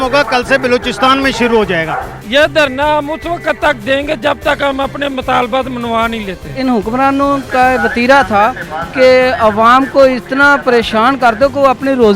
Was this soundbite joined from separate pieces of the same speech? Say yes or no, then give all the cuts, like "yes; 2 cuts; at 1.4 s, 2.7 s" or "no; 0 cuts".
yes; 2 cuts; at 2.1 s, 6.6 s